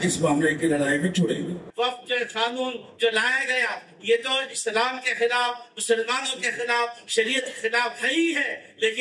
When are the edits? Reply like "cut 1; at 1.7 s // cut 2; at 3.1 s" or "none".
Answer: cut 1; at 1.6 s